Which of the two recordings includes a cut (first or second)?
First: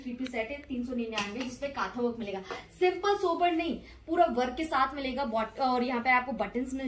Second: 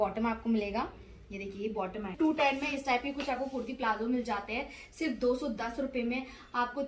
second